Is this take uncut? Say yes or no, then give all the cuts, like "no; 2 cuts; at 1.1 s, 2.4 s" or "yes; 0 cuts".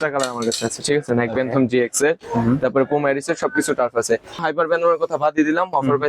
no; 1 cut; at 4.4 s